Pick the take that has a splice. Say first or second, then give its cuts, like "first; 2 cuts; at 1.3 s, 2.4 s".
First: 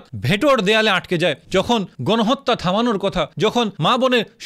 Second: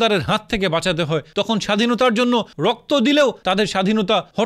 first; 1 cut; at 1.4 s